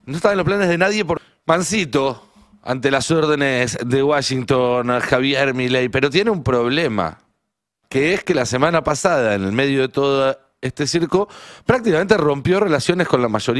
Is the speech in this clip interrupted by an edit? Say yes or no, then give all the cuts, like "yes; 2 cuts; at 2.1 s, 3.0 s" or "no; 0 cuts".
yes; 1 cut; at 1.2 s